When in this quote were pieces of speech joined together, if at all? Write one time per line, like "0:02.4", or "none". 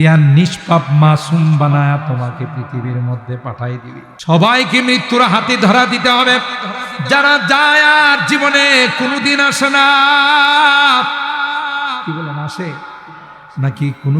0:04.0